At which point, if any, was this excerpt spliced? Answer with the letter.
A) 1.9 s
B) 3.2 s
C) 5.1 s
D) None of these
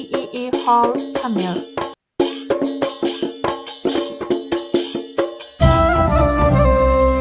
A